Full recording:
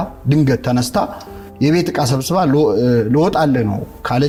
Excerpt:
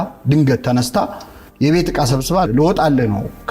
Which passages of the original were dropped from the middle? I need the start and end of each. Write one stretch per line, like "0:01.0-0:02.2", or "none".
0:02.5-0:03.0

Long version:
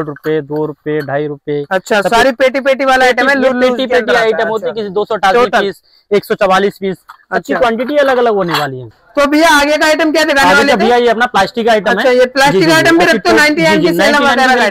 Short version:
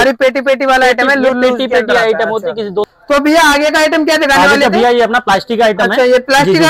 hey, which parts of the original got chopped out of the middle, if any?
0:05.1-0:09.0

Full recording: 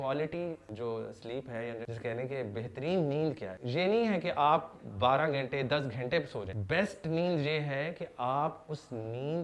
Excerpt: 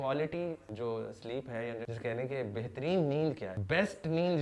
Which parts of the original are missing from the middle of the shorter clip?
0:03.5-0:06.5

